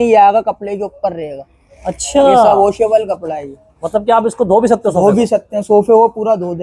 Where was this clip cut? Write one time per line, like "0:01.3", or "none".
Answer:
none